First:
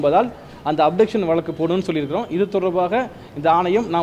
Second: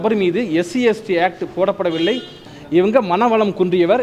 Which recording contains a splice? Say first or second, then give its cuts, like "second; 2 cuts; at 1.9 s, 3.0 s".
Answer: second; 1 cut; at 2.5 s